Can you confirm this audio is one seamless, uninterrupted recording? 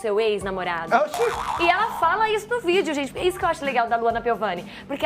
yes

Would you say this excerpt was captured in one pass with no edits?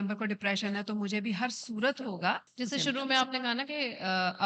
no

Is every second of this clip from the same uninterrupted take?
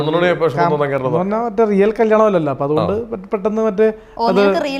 no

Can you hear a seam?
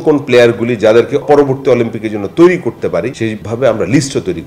yes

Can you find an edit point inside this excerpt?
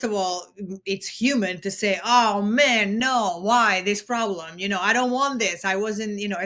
no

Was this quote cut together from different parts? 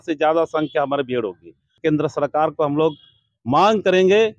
yes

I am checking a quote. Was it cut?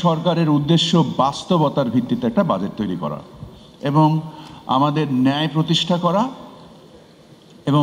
no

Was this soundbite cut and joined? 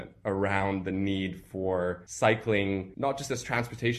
yes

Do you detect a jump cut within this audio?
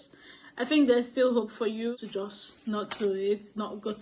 yes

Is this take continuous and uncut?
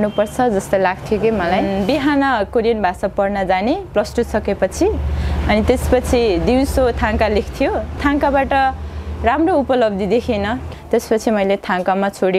no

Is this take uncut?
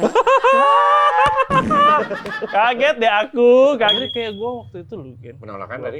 no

